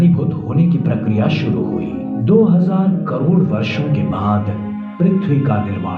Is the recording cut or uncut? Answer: cut